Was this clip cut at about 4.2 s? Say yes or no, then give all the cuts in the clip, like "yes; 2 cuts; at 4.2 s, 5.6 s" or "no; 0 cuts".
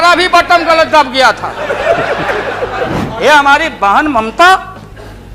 no; 1 cut; at 3.0 s